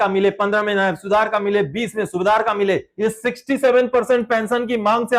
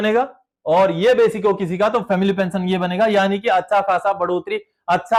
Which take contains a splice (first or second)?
first